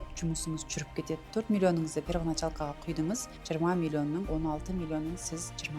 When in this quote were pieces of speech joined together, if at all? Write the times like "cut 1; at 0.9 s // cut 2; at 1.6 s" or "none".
cut 1; at 1.3 s // cut 2; at 3.3 s // cut 3; at 4.3 s